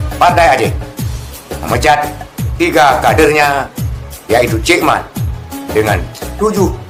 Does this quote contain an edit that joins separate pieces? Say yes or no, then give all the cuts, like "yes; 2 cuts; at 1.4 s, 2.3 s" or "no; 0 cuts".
no; 0 cuts